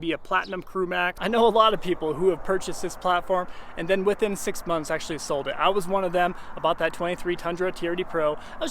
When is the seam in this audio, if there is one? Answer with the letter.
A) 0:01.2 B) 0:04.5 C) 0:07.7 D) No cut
A